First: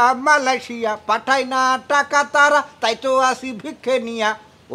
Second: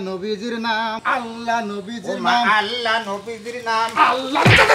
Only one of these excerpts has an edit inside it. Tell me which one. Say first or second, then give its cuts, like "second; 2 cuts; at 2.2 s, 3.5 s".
second; 1 cut; at 1.0 s